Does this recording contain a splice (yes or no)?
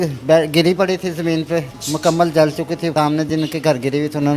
yes